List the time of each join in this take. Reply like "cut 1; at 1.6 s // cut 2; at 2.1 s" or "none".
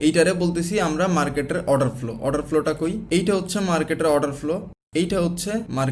none